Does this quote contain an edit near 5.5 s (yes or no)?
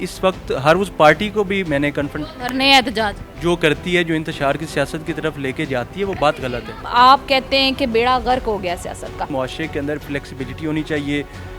no